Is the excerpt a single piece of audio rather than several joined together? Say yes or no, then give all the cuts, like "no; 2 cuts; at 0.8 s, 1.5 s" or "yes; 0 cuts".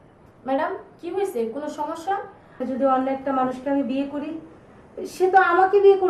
no; 1 cut; at 2.6 s